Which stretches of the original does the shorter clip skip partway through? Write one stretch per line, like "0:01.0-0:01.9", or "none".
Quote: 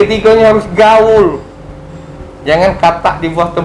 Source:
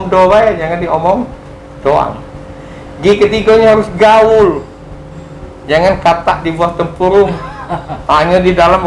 none